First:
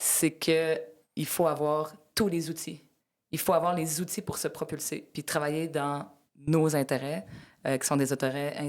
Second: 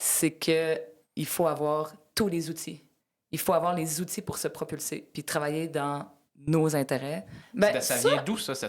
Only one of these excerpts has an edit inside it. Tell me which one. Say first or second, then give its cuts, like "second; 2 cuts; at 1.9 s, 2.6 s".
second; 1 cut; at 7.4 s